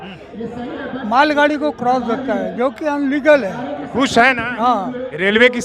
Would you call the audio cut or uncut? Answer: uncut